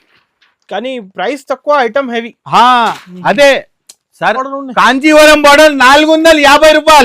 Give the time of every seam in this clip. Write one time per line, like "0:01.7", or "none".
0:04.5